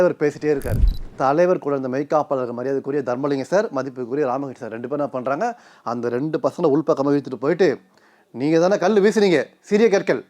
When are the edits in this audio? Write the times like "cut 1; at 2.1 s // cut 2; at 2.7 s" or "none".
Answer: cut 1; at 1.0 s